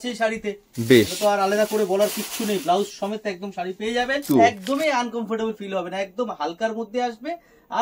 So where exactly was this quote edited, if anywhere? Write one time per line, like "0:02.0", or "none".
0:04.2